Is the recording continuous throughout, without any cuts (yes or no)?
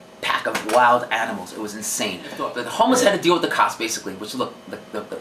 no